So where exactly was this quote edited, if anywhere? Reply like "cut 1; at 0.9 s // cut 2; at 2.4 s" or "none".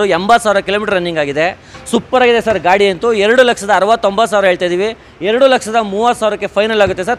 none